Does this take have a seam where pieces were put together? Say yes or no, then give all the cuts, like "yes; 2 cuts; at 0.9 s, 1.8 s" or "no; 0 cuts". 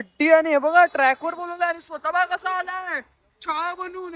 no; 0 cuts